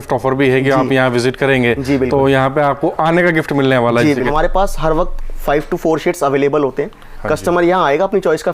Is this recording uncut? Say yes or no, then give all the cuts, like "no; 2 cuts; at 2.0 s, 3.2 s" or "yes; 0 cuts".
no; 1 cut; at 4.3 s